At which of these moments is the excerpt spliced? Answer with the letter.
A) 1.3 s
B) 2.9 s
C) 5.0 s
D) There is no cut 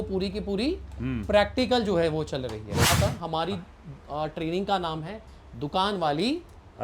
B